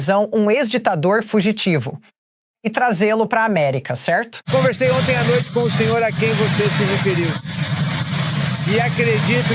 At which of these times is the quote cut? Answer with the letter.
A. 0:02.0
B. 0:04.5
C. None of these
B